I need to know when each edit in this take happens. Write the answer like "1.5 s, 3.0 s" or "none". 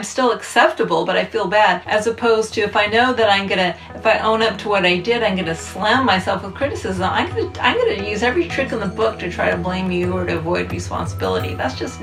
none